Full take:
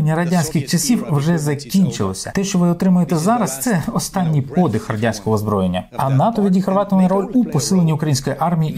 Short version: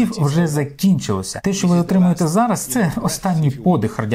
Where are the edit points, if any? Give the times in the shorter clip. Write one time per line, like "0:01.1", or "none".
none